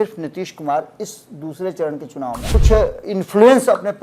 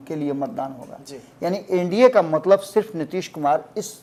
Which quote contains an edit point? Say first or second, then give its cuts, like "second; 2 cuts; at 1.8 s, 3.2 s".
first; 1 cut; at 2.5 s